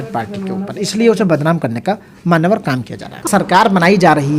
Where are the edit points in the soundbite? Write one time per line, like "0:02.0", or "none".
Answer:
0:03.2